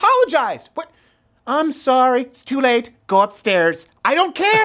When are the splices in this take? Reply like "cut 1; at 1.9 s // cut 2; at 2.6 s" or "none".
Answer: none